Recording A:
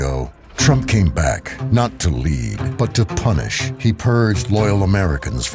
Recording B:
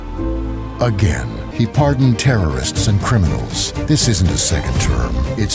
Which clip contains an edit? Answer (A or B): B